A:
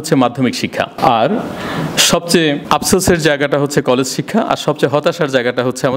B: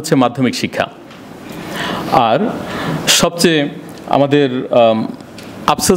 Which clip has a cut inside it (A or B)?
A